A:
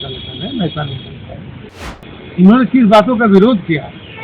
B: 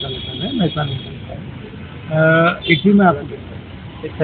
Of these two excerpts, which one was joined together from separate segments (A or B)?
A